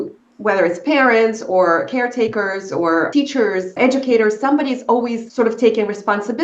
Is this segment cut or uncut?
cut